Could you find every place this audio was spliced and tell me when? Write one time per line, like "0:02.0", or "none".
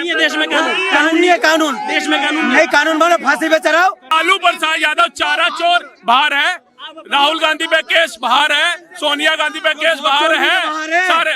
0:04.1